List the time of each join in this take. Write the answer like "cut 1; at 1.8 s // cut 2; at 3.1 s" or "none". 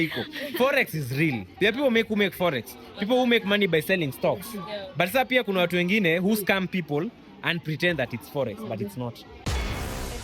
cut 1; at 9.3 s